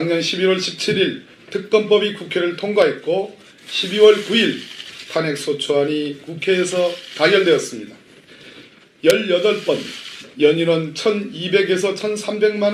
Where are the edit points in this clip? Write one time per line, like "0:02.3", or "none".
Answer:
0:01.1